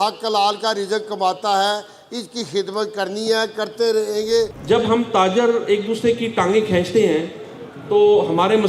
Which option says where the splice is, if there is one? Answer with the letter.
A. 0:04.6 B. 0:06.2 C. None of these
A